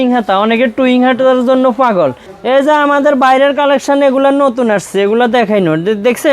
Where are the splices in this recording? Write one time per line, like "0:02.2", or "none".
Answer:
0:02.3